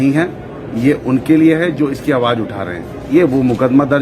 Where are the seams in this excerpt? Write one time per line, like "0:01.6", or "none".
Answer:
0:03.1